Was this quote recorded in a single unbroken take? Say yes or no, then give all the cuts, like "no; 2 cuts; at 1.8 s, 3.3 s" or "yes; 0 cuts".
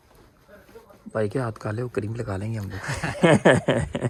yes; 0 cuts